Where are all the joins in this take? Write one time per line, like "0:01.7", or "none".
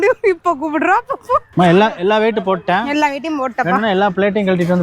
0:01.5